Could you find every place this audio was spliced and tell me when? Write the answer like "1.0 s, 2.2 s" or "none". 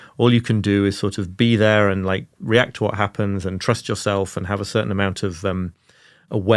none